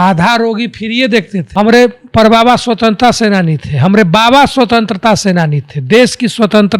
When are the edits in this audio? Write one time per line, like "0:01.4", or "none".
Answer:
0:01.5